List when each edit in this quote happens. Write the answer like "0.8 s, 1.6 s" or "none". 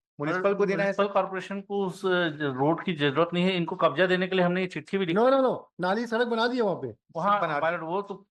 none